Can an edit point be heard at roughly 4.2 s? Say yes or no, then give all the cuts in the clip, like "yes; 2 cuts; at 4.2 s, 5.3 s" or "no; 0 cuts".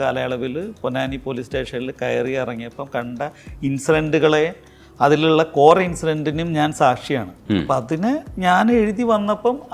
no; 0 cuts